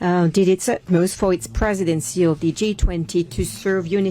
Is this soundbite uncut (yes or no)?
yes